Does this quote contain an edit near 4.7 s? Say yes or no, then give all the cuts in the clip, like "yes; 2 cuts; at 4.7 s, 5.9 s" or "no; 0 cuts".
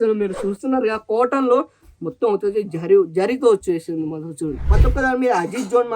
yes; 1 cut; at 4.7 s